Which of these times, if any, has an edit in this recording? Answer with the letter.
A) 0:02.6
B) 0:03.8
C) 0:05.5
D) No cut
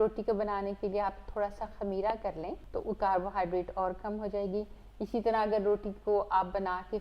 A